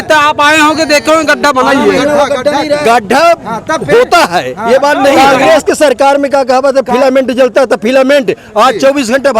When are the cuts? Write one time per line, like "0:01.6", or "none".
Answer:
0:02.0
0:05.1